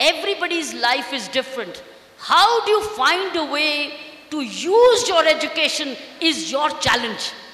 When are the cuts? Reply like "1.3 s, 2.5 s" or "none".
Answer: none